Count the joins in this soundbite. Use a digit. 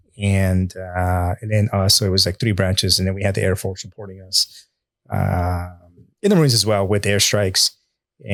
0